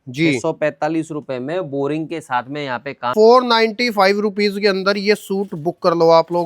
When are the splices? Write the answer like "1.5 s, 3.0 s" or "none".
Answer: 3.1 s